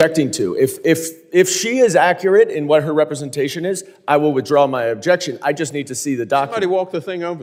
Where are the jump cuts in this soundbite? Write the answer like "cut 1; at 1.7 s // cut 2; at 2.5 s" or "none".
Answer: none